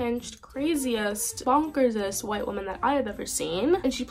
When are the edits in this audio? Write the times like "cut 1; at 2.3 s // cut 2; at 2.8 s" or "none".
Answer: cut 1; at 1.3 s